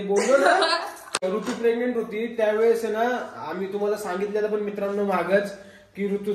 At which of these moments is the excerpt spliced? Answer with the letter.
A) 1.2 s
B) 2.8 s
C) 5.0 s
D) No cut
A